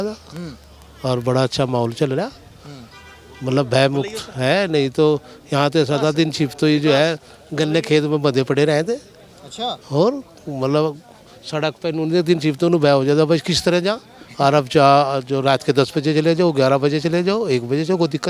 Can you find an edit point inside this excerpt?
no; 0 cuts

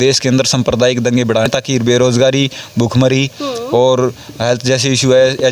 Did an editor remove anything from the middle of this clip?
no; 0 cuts

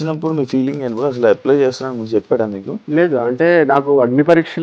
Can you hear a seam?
yes; 1 cut; at 2.8 s

